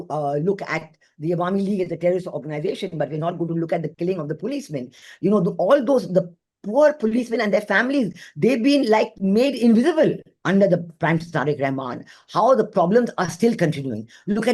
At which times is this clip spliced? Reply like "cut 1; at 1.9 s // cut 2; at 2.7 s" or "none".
cut 1; at 10.3 s